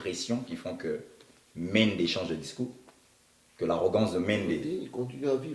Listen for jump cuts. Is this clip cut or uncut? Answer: cut